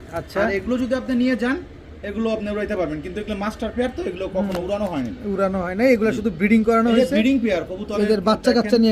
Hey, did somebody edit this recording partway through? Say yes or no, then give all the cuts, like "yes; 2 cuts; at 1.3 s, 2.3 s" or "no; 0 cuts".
no; 0 cuts